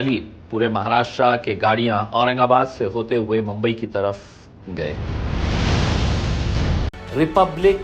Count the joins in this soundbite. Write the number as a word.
one